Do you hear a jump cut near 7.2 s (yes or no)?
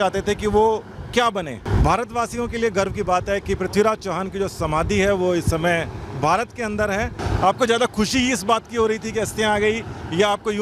yes